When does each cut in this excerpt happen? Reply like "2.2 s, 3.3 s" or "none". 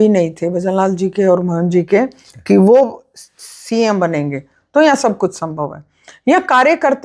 none